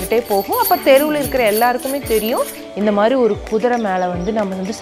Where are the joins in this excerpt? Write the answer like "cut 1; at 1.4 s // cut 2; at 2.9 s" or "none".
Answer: cut 1; at 2.6 s